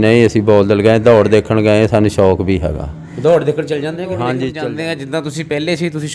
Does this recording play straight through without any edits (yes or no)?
no